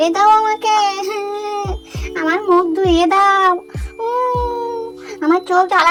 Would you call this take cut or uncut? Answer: uncut